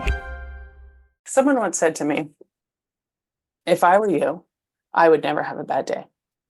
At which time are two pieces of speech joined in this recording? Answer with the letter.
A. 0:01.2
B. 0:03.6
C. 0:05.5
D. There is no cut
A